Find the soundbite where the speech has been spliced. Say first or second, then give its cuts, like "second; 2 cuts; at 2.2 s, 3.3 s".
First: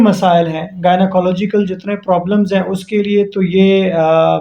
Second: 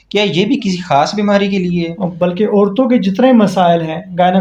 second; 1 cut; at 2.0 s